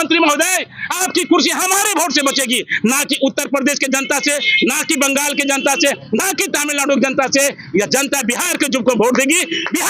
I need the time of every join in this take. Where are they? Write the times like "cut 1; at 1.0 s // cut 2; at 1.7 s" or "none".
none